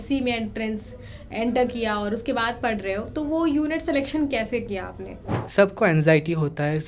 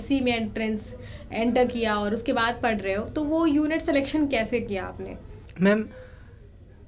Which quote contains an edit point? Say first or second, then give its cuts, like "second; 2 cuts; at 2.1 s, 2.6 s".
first; 1 cut; at 5.3 s